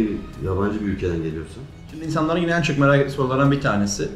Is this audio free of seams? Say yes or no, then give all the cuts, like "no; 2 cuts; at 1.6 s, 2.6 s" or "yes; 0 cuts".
no; 1 cut; at 1.8 s